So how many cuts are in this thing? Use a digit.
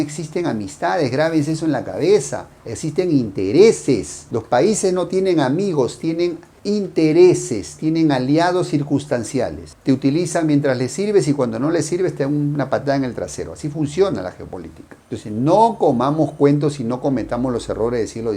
0